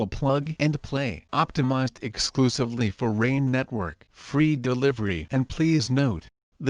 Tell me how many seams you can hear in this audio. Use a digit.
1